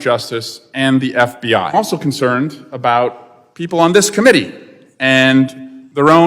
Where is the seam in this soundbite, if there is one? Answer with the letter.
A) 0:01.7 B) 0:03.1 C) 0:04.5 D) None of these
A